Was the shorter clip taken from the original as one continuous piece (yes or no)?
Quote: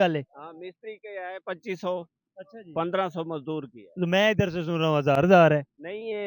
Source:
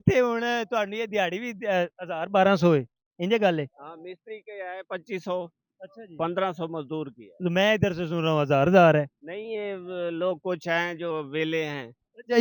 yes